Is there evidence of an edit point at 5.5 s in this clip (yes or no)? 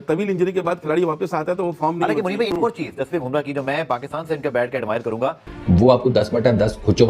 yes